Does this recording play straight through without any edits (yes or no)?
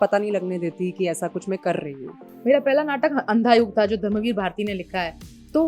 no